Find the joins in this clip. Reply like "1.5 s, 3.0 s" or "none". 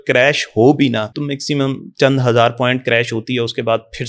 1.1 s